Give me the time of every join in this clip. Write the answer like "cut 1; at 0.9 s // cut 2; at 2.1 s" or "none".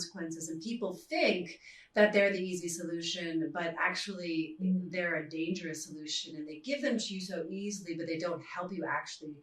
none